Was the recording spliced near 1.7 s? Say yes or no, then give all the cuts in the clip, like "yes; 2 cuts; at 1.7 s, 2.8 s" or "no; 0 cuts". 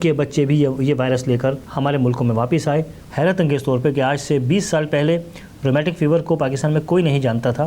yes; 2 cuts; at 1.7 s, 3.0 s